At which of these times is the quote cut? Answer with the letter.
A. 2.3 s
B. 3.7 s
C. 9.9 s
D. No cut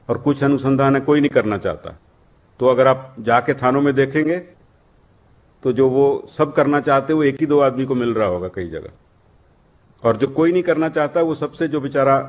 D